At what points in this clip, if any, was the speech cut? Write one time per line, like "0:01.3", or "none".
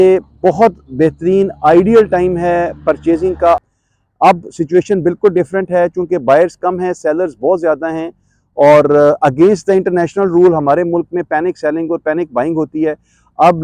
0:03.6